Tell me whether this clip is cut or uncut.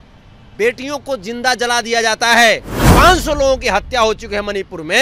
cut